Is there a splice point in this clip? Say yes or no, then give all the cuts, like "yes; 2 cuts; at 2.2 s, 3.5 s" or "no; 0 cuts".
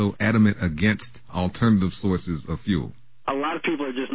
no; 0 cuts